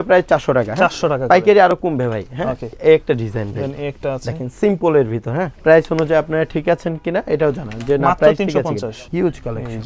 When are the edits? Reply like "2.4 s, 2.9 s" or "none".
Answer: 2.8 s, 5.5 s, 9.0 s